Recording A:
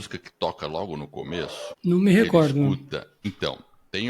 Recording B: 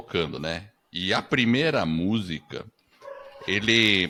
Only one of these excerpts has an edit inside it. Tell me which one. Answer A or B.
A